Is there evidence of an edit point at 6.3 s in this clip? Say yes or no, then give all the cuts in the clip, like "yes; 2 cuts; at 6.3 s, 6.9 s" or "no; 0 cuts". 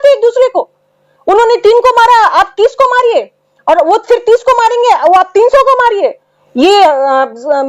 yes; 1 cut; at 6.3 s